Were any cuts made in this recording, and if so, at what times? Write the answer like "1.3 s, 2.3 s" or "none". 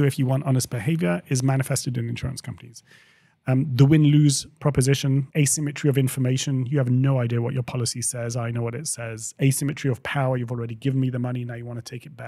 5.3 s